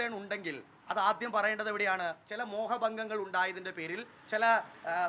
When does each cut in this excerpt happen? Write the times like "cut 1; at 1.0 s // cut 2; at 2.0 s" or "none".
cut 1; at 2.3 s

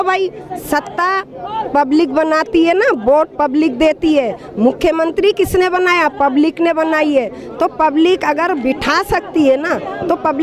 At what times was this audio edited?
none

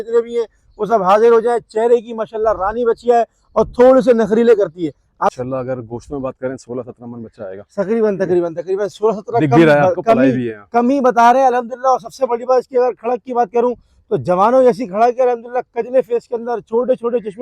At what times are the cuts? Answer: cut 1; at 5.3 s

